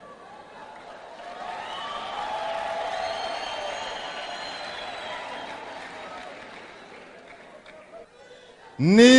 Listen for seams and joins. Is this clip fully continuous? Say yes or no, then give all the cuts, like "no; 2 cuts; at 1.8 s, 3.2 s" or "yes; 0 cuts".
no; 1 cut; at 8.1 s